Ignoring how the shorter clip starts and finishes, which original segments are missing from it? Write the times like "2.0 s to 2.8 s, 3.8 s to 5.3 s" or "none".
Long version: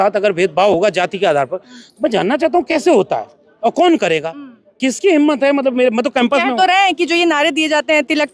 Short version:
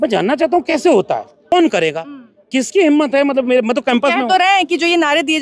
3.5 s to 3.7 s